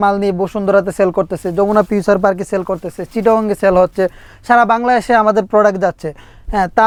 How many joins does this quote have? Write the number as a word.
zero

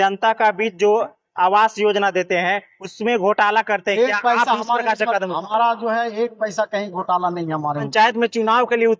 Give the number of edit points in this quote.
one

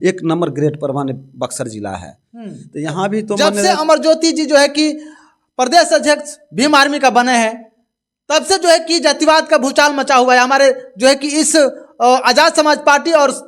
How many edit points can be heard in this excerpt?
one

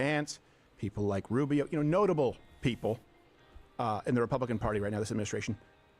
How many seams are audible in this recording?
zero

